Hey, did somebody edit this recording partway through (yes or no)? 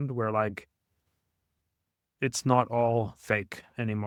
no